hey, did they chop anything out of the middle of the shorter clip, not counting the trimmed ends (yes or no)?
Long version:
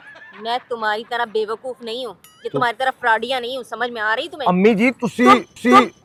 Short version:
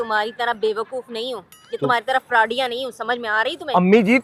no